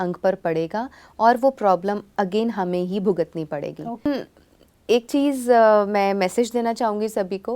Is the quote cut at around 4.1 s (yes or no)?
yes